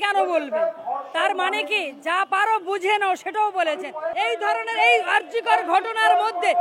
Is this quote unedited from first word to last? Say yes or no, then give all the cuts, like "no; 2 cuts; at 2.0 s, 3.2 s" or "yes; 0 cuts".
no; 1 cut; at 4.1 s